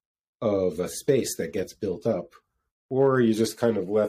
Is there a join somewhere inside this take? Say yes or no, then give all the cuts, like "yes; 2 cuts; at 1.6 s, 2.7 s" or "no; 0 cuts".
no; 0 cuts